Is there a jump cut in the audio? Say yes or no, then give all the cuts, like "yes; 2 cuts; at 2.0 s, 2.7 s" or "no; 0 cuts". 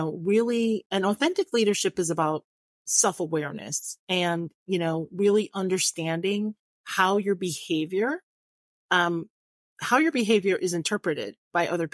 no; 0 cuts